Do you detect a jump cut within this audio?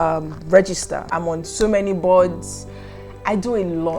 yes; 1 cut; at 1.1 s

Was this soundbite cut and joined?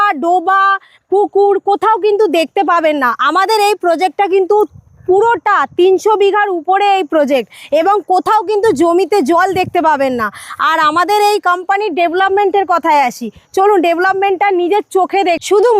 no; 0 cuts

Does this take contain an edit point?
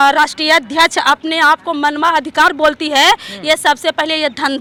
no; 0 cuts

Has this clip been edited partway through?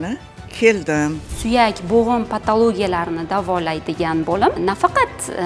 yes; 2 cuts; at 1.2 s, 4.6 s

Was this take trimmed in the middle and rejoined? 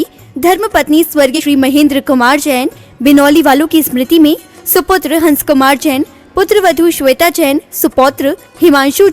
yes; 1 cut; at 1.3 s

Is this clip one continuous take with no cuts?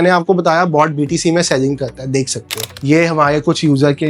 no; 1 cut; at 2.7 s

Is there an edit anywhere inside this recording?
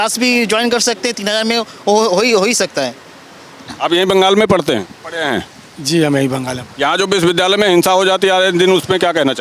no; 0 cuts

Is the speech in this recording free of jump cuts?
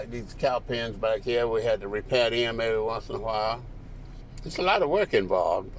yes; 0 cuts

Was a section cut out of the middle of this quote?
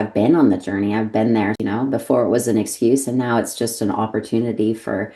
yes; 1 cut; at 1.6 s

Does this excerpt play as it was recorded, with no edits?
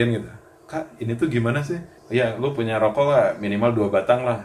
no; 1 cut; at 1.9 s

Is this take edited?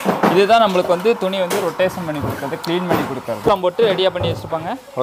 yes; 1 cut; at 3.4 s

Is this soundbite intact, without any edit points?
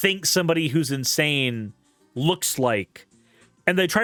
yes; 0 cuts

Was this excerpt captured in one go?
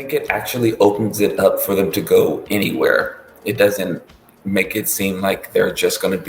yes; 0 cuts

